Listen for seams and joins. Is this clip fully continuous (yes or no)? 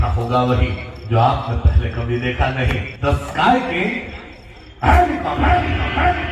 no